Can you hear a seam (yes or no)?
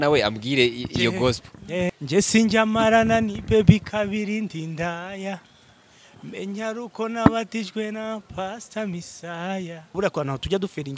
yes